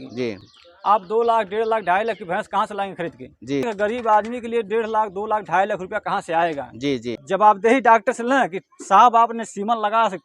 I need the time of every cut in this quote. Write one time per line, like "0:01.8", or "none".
0:03.7
0:07.2